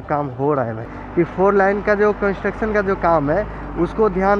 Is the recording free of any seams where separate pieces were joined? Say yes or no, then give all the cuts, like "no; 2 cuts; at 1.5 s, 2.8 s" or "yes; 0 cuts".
no; 1 cut; at 1.0 s